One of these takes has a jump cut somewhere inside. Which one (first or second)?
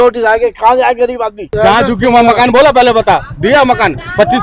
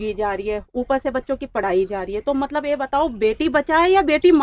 first